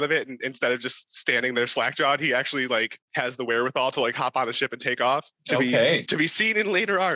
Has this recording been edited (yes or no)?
yes